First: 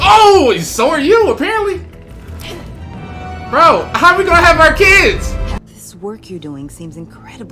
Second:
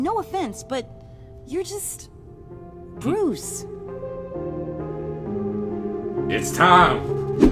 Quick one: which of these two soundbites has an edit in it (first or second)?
first